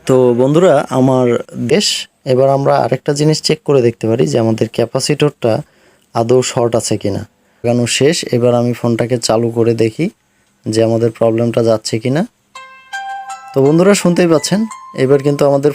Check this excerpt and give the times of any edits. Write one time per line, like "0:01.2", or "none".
0:01.7
0:07.6